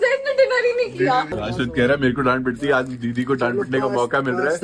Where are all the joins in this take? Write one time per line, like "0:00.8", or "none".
0:01.3